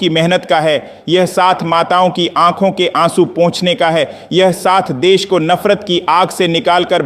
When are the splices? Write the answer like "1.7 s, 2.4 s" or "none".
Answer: 3.8 s